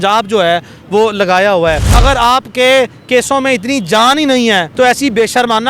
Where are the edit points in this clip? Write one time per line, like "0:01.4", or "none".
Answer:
0:01.9
0:04.7